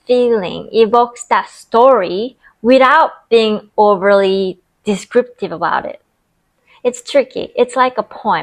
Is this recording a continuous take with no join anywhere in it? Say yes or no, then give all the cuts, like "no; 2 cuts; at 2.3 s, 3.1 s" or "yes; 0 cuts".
yes; 0 cuts